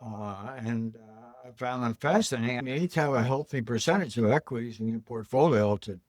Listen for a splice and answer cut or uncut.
cut